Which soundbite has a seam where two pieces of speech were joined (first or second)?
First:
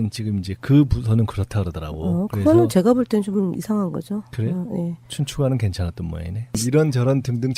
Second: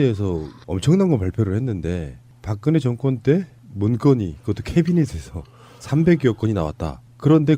first